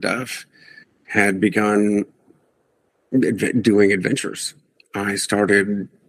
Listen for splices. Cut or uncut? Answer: uncut